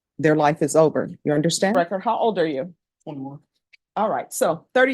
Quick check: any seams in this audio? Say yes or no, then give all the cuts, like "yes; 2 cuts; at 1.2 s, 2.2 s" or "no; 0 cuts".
yes; 1 cut; at 1.7 s